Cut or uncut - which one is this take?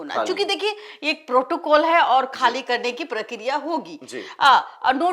uncut